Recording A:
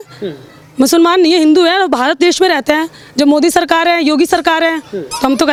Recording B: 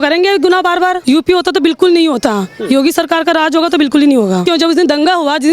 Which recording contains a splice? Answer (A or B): B